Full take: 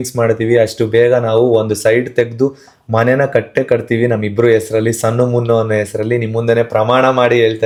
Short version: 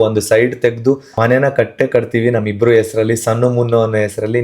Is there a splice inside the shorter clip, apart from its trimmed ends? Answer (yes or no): yes